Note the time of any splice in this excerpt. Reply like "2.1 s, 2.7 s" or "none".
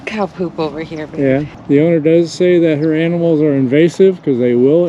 1.5 s

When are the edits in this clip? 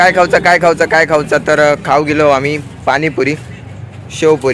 none

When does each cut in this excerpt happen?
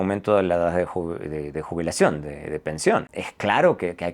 3.2 s

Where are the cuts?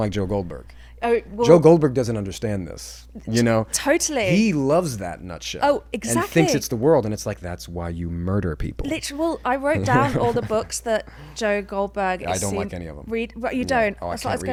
none

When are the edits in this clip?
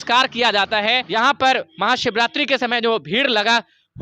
1.0 s

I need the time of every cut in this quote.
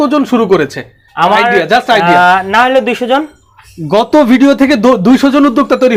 none

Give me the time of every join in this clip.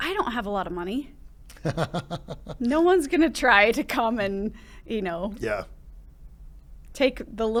none

